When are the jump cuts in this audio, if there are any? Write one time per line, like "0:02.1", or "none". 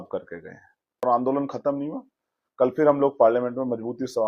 0:01.0